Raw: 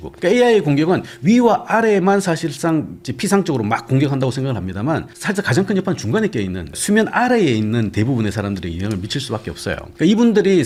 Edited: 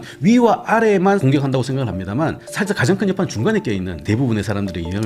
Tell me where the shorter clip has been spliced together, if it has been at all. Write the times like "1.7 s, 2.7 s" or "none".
1.2 s, 4.0 s